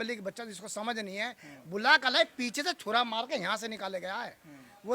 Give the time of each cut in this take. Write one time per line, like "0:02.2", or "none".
none